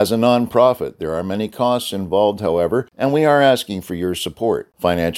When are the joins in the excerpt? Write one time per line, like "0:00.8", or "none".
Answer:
0:02.9